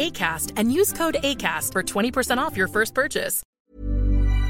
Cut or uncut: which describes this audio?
cut